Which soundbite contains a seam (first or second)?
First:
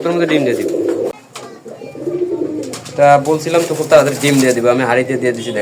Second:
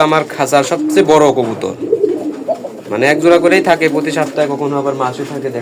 first